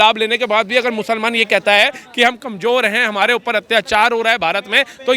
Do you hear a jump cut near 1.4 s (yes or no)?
no